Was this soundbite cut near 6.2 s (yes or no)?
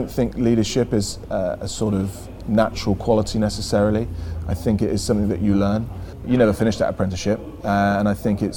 yes